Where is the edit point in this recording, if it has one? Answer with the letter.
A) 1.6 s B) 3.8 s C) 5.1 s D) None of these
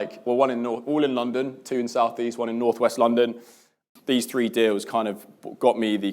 B